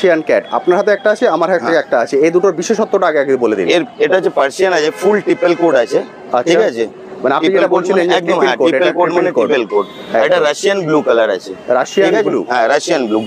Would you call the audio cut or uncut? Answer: uncut